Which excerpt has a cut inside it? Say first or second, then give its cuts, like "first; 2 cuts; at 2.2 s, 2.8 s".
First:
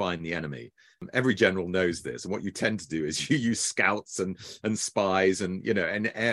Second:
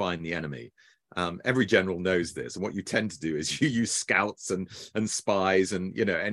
first; 1 cut; at 1.1 s